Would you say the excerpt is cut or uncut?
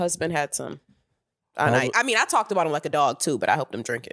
uncut